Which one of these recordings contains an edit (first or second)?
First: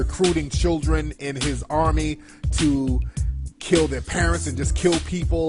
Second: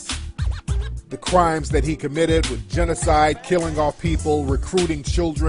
second